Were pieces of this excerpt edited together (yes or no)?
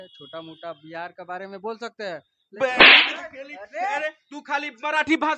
yes